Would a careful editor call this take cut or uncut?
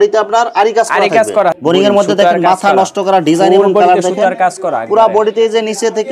cut